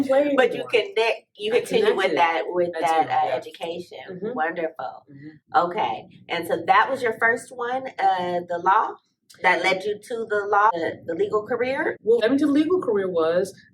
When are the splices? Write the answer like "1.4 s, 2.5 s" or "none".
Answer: 10.7 s, 12.2 s